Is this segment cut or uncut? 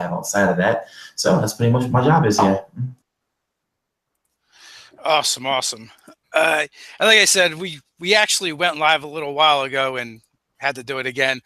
cut